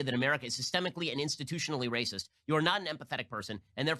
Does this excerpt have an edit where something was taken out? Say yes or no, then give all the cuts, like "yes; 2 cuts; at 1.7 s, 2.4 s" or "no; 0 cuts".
no; 0 cuts